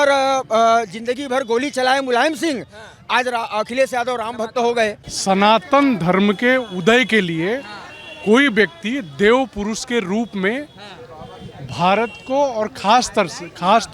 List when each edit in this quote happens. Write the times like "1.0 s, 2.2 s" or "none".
5.1 s